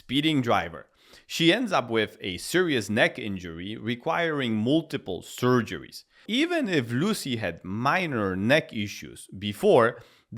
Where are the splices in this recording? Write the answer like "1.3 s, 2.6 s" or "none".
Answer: 6.2 s